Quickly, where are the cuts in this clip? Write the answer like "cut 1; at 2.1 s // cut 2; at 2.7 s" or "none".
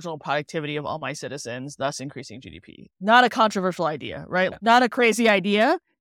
cut 1; at 4.6 s